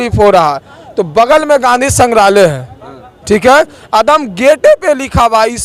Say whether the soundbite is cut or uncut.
uncut